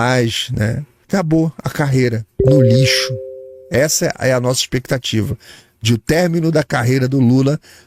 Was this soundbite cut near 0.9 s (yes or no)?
yes